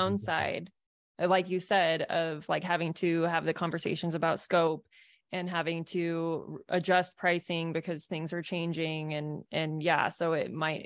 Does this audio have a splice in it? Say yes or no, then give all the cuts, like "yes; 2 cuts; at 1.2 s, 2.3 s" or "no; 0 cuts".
no; 0 cuts